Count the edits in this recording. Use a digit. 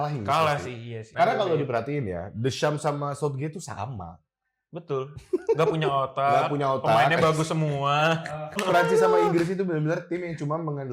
2